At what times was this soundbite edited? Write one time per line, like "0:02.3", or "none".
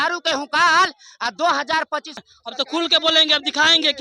0:02.2